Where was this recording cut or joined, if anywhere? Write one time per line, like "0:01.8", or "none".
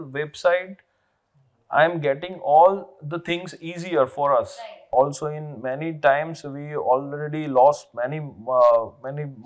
0:04.9